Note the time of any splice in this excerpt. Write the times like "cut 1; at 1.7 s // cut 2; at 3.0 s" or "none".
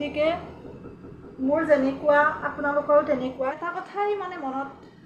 cut 1; at 3.5 s